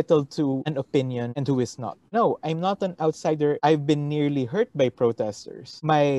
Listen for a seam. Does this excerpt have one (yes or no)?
yes